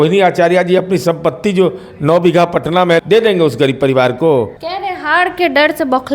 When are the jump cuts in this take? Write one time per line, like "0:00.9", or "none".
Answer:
0:03.0
0:04.6